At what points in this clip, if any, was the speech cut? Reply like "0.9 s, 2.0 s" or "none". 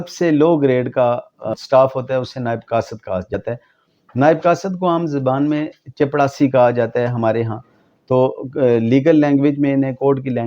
1.5 s, 3.3 s